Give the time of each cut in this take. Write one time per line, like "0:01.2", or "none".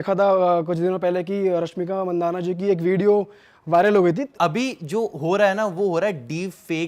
0:04.3